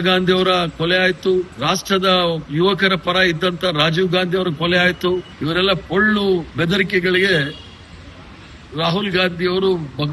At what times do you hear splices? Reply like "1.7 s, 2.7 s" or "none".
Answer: 1.5 s, 5.3 s